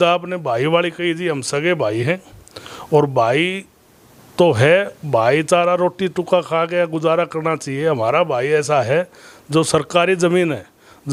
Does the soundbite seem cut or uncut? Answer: uncut